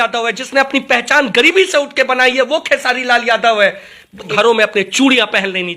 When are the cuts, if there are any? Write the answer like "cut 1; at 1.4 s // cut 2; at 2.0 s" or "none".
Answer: cut 1; at 4.3 s

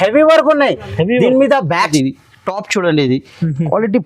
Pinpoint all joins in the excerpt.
cut 1; at 1.9 s

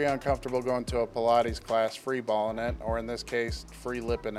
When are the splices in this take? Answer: none

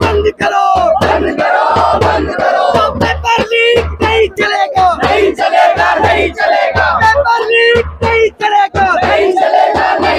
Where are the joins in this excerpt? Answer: none

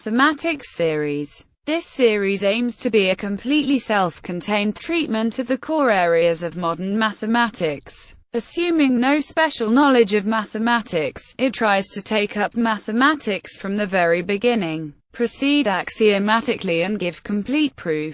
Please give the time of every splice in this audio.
none

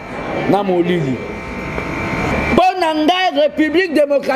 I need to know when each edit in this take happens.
cut 1; at 2.3 s

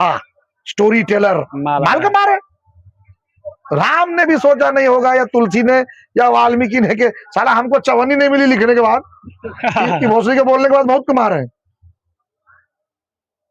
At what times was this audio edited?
none

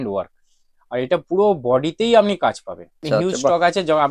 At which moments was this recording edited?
cut 1; at 3.0 s

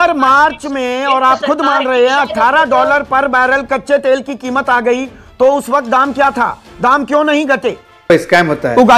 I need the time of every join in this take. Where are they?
cut 1; at 8.1 s

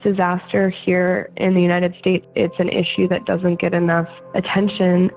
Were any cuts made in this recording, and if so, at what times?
cut 1; at 2.2 s // cut 2; at 4.2 s

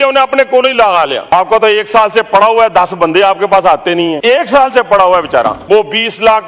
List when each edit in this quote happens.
cut 1; at 1.3 s // cut 2; at 4.2 s // cut 3; at 5.6 s

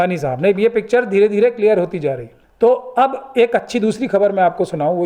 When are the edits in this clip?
none

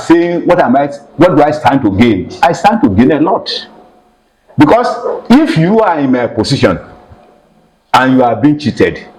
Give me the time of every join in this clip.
none

